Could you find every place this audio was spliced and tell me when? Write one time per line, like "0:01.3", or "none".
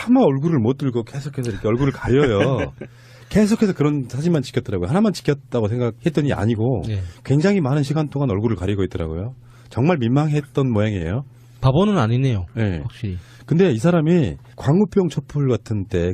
none